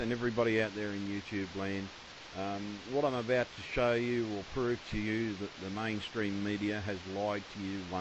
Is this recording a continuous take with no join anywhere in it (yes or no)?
yes